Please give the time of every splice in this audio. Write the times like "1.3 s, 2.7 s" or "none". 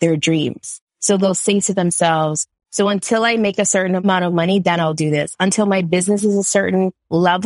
4.0 s